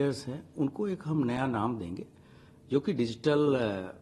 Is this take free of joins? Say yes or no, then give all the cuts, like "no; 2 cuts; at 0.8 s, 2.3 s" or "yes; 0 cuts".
yes; 0 cuts